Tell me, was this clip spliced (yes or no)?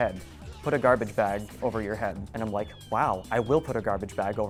no